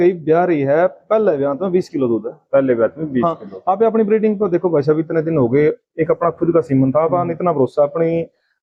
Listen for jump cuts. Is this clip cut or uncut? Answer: uncut